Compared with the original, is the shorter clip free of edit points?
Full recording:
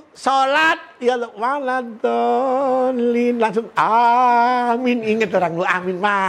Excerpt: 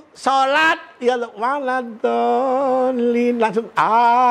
yes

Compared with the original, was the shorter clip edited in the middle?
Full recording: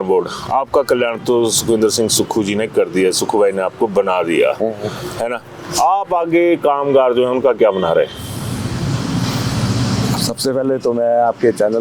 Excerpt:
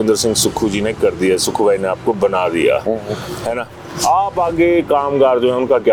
no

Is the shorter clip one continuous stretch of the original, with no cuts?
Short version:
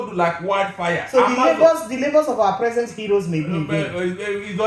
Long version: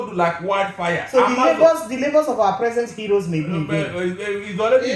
yes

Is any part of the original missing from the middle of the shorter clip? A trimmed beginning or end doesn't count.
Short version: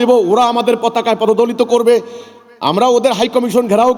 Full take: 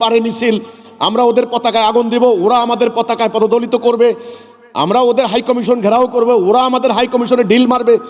no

